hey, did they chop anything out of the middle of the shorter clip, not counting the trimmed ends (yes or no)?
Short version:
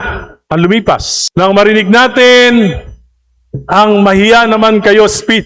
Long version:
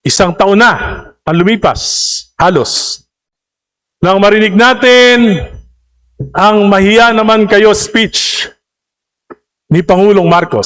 yes